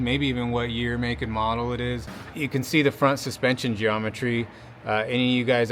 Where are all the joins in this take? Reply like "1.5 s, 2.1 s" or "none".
2.2 s